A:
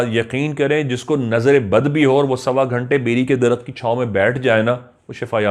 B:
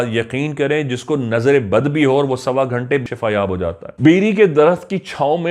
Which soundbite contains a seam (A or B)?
B